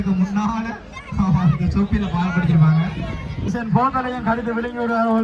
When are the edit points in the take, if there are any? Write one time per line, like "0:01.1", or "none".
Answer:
0:03.5